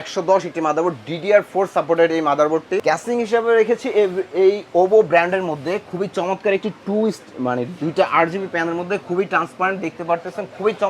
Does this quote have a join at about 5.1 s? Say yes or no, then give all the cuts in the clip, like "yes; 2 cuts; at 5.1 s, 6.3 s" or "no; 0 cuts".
no; 1 cut; at 2.8 s